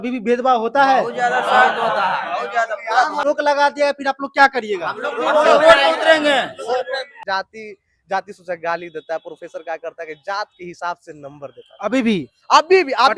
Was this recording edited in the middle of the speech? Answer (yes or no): yes